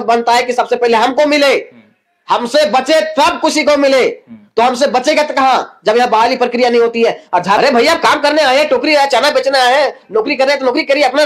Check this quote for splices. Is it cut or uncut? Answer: cut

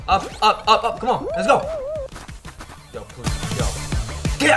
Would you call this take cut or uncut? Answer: uncut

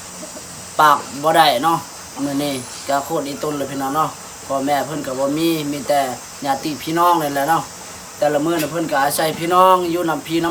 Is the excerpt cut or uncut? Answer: uncut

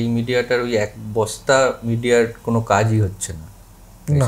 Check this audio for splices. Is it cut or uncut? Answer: uncut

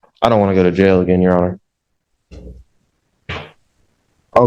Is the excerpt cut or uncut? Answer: uncut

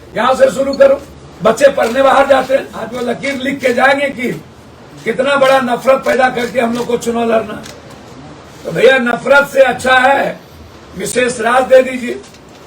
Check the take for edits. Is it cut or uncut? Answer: cut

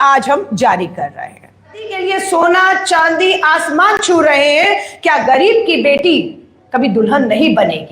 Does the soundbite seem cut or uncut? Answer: cut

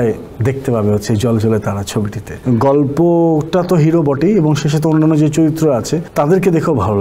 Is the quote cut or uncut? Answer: cut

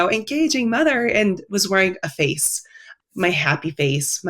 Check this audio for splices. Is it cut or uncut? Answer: cut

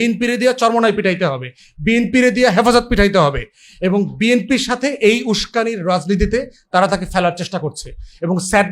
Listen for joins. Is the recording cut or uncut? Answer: uncut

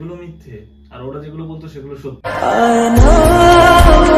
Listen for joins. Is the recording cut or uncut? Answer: uncut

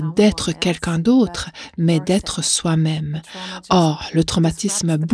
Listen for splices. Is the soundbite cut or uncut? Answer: uncut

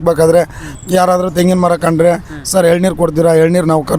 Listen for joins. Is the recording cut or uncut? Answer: uncut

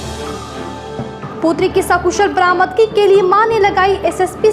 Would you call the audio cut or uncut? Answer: cut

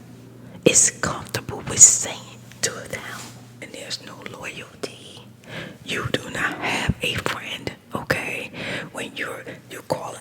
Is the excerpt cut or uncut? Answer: cut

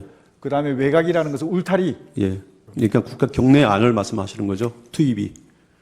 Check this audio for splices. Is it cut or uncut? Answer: cut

